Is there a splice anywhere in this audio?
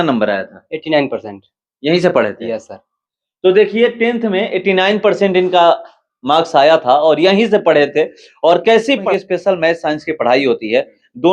yes; 1 cut; at 9.0 s

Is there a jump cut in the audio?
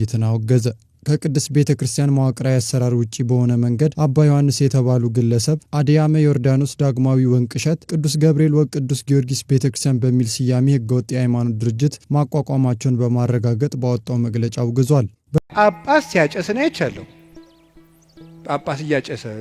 yes; 1 cut; at 15.4 s

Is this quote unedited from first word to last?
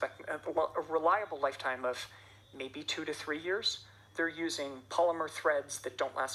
yes; 0 cuts

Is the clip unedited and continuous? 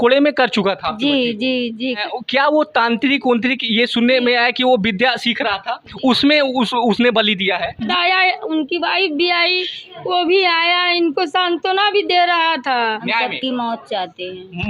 no; 3 cuts; at 2.0 s, 7.9 s, 13.0 s

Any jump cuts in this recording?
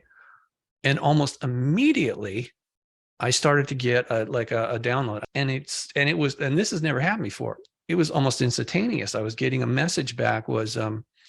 yes; 1 cut; at 5.2 s

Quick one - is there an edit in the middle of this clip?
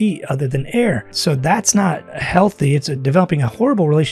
yes; 2 cuts; at 1.1 s, 2.1 s

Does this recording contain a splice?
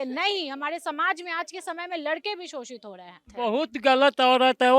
yes; 1 cut; at 3.2 s

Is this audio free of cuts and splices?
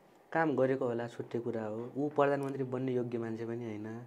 yes; 0 cuts

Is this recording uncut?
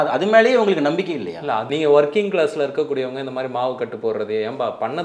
no; 1 cut; at 1.7 s

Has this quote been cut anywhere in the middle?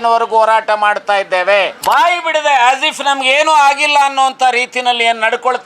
yes; 1 cut; at 1.7 s

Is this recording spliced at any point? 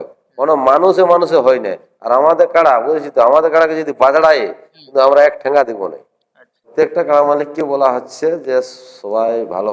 yes; 1 cut; at 6.7 s

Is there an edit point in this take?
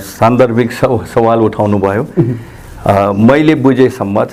no; 0 cuts

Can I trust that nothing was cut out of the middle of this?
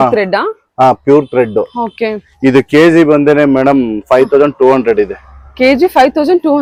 yes; 0 cuts

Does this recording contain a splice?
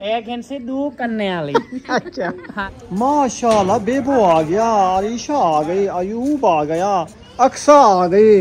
yes; 2 cuts; at 2.6 s, 7.2 s

